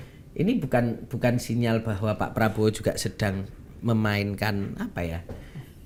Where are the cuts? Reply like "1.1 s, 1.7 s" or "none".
none